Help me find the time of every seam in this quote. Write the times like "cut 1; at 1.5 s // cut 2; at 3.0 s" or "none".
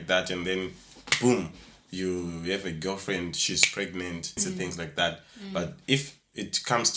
cut 1; at 4.4 s